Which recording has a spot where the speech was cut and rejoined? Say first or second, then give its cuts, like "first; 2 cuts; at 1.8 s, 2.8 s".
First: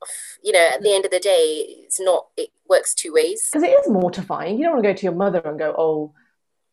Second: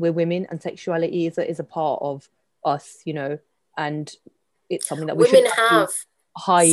first; 1 cut; at 3.4 s